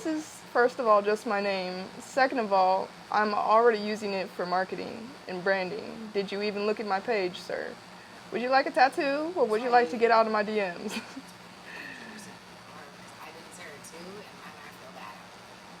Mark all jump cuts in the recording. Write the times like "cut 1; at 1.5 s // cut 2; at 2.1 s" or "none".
none